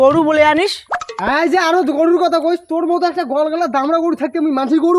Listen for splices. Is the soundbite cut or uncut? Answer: uncut